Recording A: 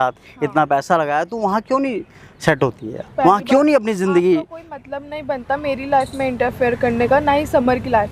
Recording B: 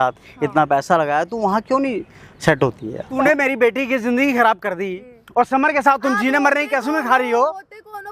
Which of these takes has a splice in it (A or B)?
B